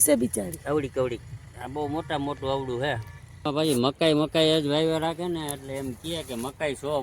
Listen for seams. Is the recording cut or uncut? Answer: cut